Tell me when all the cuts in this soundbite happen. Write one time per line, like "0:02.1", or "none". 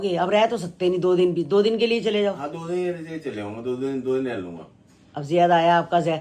none